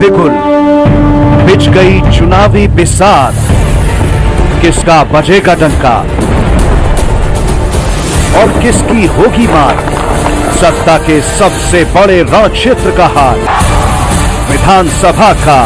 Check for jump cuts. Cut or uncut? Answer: uncut